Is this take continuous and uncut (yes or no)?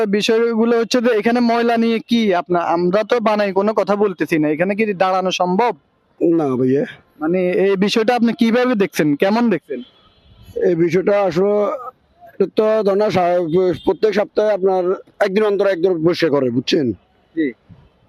yes